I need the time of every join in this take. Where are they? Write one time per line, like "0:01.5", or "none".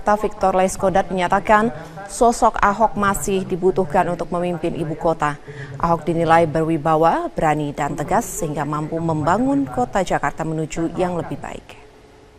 none